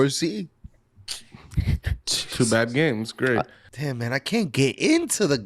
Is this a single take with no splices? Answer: no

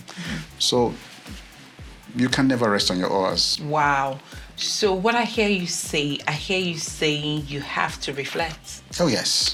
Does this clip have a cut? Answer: no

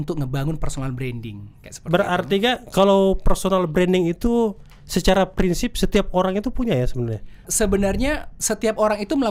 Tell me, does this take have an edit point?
no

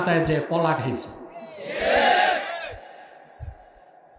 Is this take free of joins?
yes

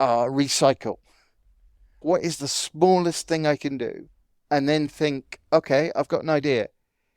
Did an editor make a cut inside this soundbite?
yes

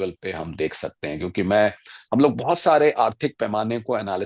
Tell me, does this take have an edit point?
no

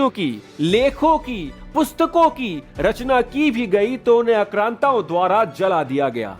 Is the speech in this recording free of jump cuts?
yes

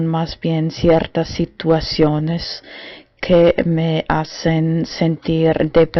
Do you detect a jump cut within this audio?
yes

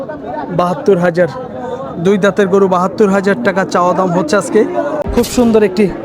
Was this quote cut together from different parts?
yes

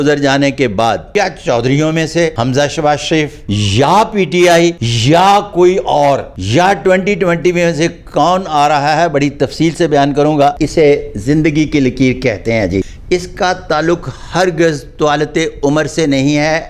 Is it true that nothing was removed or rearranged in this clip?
no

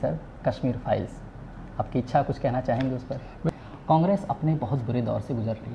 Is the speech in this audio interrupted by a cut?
yes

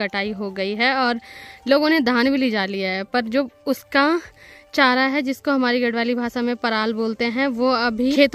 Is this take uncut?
yes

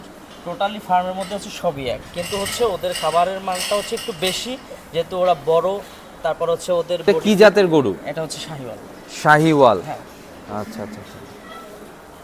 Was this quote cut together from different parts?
yes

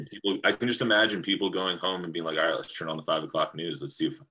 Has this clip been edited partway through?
no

